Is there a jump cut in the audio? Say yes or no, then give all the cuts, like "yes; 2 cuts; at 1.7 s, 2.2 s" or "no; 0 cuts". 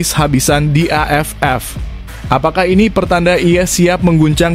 no; 0 cuts